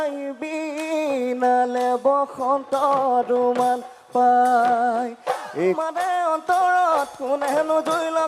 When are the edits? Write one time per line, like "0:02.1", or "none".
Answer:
0:05.8